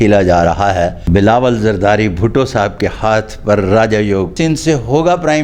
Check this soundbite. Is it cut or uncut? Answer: cut